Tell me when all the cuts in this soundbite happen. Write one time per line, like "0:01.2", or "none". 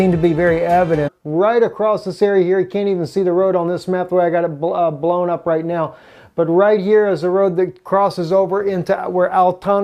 none